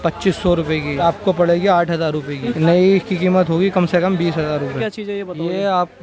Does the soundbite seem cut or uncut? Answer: cut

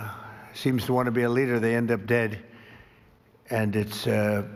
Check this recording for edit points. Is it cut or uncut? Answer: uncut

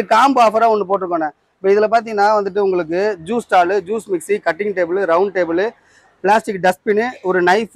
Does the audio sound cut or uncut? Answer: uncut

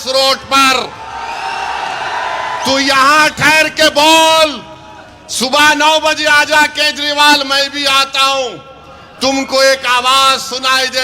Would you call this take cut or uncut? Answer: uncut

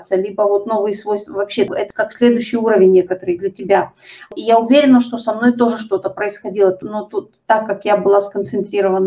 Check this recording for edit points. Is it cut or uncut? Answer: cut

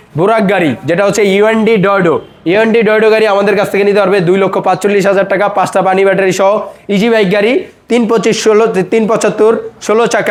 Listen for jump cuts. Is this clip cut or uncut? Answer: uncut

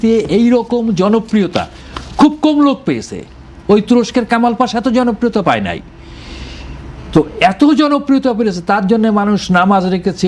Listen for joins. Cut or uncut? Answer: uncut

